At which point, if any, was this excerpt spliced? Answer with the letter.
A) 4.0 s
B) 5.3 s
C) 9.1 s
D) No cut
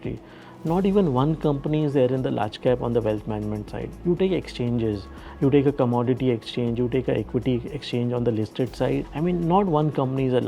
C